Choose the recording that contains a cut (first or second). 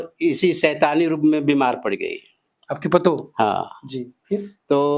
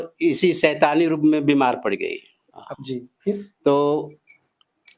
second